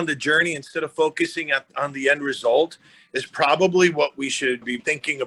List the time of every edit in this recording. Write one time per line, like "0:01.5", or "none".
none